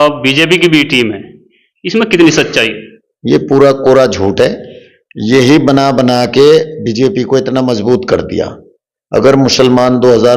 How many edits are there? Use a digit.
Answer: 0